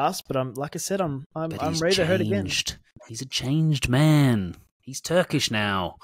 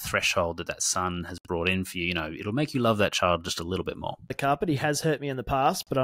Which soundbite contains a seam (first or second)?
second